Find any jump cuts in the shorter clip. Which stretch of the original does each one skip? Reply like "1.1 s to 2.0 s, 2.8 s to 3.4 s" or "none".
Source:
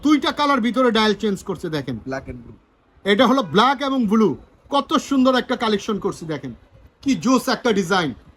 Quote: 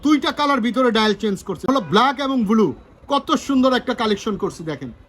1.7 s to 3.3 s